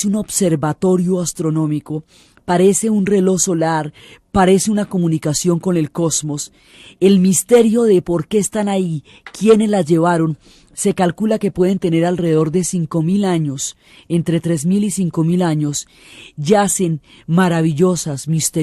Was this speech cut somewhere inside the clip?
yes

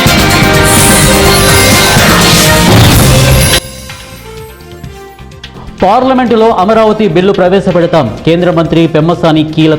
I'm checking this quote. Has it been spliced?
yes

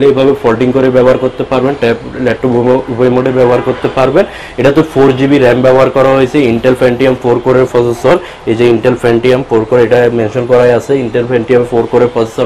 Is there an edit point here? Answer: no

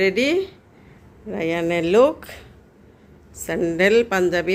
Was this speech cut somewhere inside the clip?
no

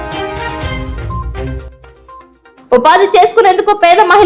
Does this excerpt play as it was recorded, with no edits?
yes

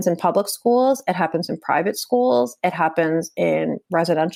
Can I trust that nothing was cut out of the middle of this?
yes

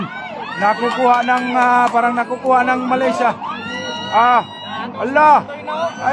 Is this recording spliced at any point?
no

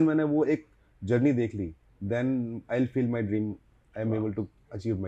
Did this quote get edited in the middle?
no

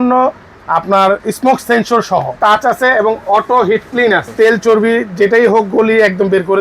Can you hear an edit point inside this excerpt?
yes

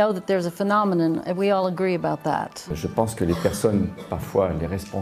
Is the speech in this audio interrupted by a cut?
yes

